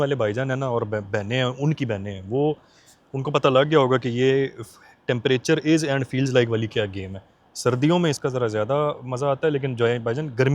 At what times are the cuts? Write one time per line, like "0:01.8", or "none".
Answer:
none